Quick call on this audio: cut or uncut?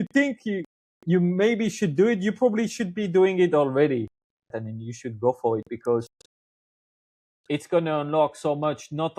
cut